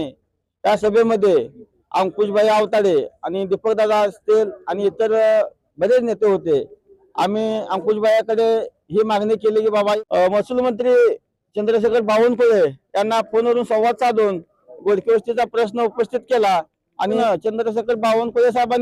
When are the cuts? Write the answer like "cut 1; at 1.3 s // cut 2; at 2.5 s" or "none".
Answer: cut 1; at 10.0 s // cut 2; at 17.2 s